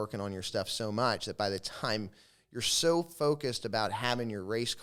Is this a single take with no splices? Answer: yes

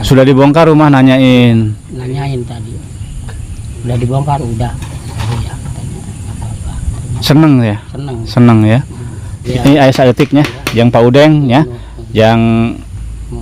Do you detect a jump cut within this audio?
yes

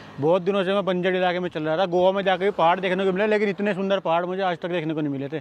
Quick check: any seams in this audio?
no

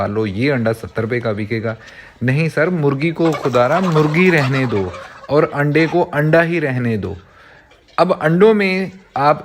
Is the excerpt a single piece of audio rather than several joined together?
yes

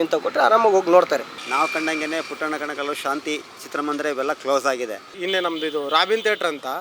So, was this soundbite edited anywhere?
yes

